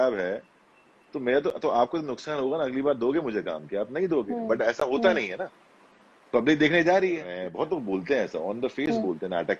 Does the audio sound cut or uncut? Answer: cut